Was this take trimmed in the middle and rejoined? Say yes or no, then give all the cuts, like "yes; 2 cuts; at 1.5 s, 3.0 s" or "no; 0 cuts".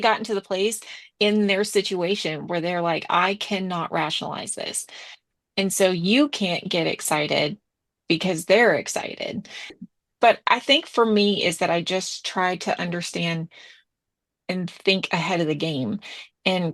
yes; 1 cut; at 9.9 s